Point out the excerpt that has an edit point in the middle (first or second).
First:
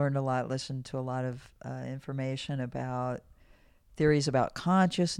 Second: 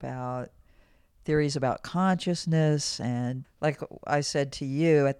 second